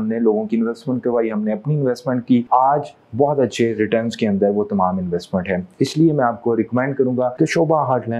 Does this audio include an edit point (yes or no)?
no